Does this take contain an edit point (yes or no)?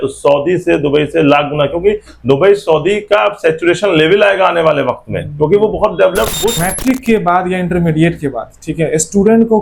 yes